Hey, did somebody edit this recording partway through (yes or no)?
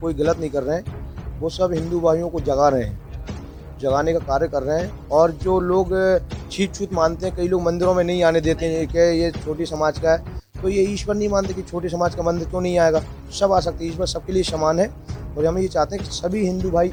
no